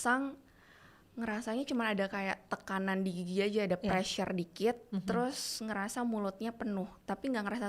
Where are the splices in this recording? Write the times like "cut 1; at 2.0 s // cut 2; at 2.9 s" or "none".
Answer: none